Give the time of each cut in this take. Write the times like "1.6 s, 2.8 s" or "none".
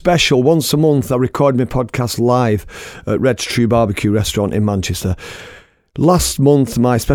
none